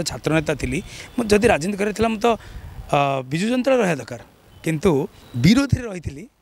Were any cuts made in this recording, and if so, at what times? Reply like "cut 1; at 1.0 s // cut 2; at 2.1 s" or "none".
cut 1; at 5.2 s